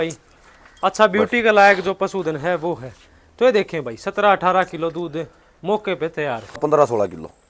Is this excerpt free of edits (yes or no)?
no